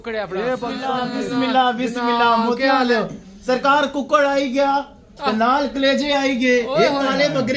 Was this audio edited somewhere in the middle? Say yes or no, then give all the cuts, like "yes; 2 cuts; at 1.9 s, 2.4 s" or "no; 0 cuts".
yes; 1 cut; at 1.1 s